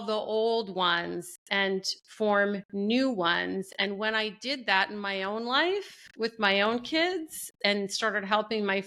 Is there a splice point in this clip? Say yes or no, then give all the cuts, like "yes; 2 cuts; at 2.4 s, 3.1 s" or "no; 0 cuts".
no; 0 cuts